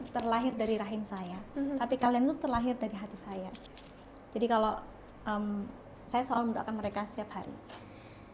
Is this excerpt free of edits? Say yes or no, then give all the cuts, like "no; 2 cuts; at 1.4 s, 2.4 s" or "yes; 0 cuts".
yes; 0 cuts